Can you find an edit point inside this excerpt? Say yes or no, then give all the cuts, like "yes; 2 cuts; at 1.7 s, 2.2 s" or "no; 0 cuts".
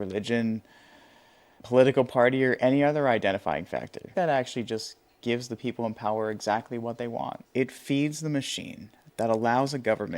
yes; 2 cuts; at 4.0 s, 7.4 s